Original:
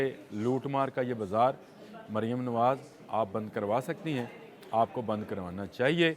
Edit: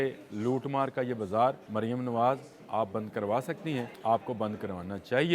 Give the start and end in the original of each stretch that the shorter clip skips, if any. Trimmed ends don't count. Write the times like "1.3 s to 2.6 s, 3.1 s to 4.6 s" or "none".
1.6 s to 2.0 s, 4.3 s to 4.6 s

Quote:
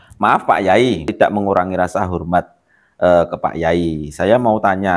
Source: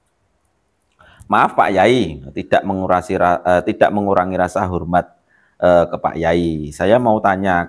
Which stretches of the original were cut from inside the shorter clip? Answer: 2.2 s to 3.7 s

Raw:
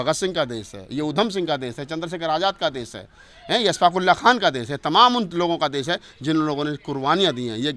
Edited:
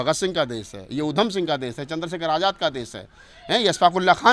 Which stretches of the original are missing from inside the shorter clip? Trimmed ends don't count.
none

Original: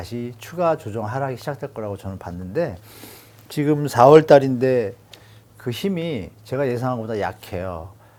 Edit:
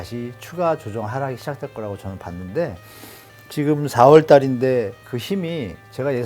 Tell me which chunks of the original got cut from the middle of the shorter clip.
5.1 s to 5.6 s

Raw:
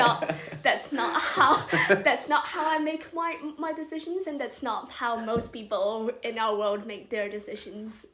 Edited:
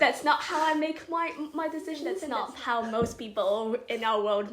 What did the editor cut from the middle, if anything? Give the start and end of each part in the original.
4.3 s to 4.6 s

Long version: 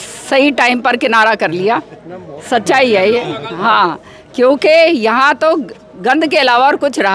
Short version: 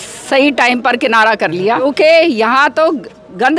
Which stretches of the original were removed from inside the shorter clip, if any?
1.8 s to 4.5 s

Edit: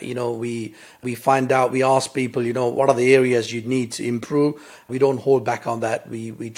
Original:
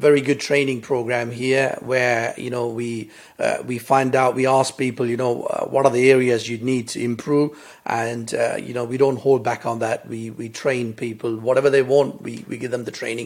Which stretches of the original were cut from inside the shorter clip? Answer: 3.3 s to 3.6 s, 5.4 s to 5.7 s, 7.8 s to 8.9 s

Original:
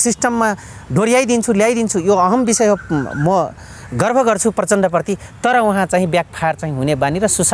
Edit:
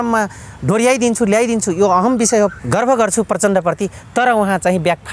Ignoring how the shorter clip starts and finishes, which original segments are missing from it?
2.8 s to 3.8 s

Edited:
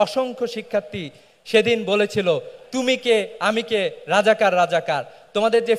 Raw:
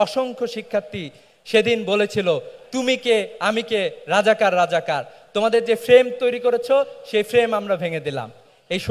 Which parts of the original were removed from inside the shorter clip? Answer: none

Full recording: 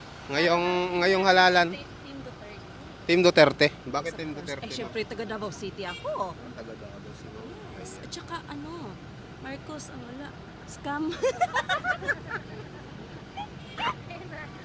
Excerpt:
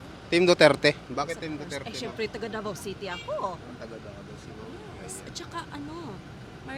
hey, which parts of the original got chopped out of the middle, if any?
none

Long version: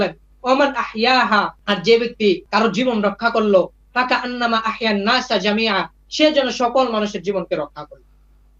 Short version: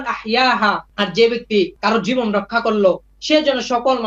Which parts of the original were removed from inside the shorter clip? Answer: 3.8 s to 6.0 s

